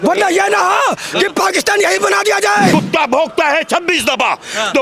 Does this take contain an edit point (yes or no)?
yes